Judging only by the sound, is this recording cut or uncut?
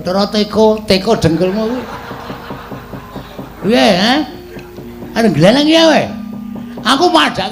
cut